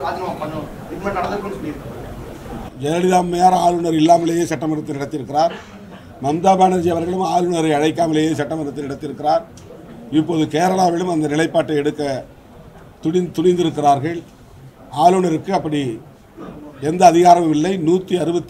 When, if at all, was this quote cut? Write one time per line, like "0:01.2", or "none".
none